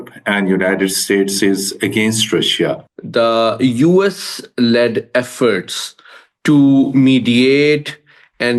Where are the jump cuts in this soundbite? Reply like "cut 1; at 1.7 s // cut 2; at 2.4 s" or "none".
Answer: cut 1; at 2.8 s

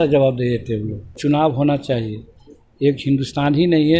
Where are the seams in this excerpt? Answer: cut 1; at 1.2 s

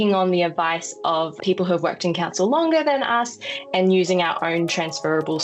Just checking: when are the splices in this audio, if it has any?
cut 1; at 1.4 s

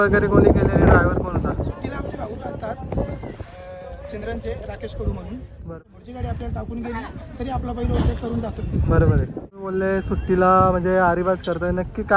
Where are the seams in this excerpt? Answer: cut 1; at 5.7 s // cut 2; at 9.7 s

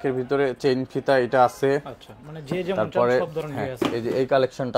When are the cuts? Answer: none

